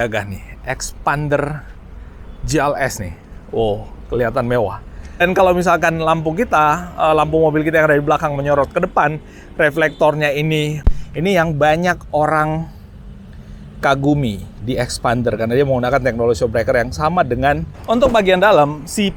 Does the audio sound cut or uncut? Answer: cut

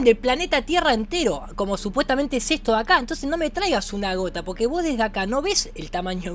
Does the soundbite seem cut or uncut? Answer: uncut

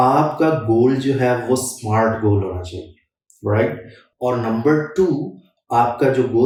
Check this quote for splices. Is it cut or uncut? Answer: uncut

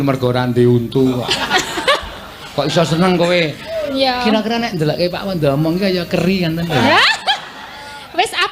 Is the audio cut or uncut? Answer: uncut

